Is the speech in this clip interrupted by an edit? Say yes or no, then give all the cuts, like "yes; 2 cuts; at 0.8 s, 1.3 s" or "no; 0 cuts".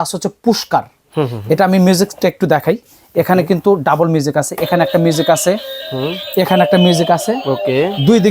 no; 0 cuts